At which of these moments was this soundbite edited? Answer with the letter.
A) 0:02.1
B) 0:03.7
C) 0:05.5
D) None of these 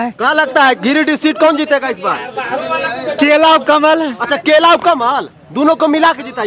D